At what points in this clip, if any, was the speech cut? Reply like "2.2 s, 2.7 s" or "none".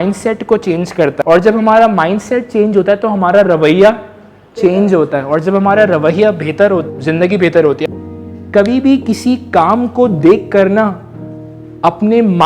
1.2 s, 6.8 s, 7.8 s

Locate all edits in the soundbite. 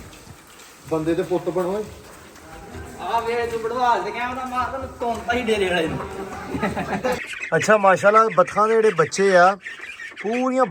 7.2 s

